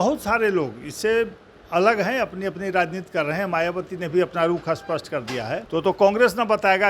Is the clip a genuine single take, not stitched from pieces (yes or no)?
no